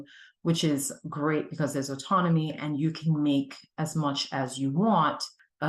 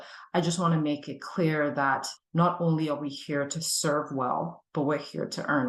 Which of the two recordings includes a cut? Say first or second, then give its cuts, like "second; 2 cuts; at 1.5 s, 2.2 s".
second; 1 cut; at 2.2 s